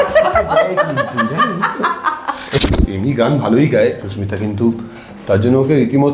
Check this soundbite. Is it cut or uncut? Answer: cut